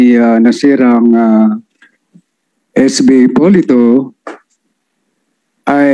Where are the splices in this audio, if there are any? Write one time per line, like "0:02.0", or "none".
none